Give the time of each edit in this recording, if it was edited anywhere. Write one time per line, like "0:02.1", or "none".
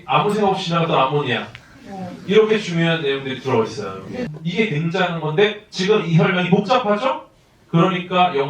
0:04.3

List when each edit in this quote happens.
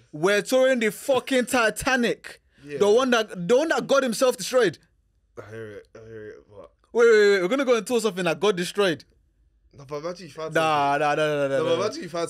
none

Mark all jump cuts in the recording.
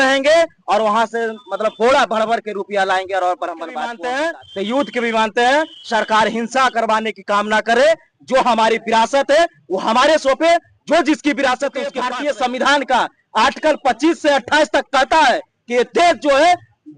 0:03.9
0:12.0

